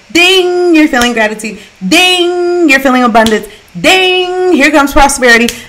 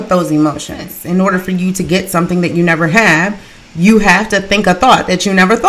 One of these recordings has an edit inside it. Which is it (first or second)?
second